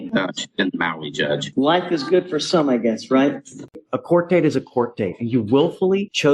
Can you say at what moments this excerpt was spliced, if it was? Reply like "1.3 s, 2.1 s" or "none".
1.5 s, 3.7 s